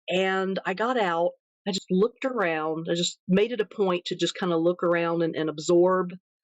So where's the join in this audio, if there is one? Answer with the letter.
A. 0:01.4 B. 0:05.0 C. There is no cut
A